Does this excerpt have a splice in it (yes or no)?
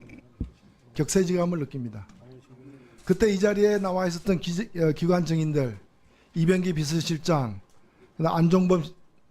yes